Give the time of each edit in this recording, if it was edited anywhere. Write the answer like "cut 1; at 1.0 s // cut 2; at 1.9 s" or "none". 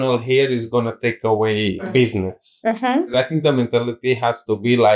cut 1; at 1.9 s // cut 2; at 3.1 s